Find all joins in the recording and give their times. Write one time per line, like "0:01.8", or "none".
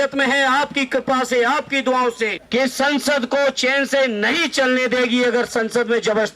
0:02.4